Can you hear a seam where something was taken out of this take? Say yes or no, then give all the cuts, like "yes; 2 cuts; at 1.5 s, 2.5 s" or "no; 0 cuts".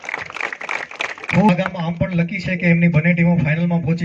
yes; 1 cut; at 1.5 s